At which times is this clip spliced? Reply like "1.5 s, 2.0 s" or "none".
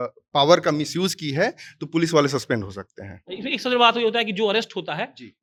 none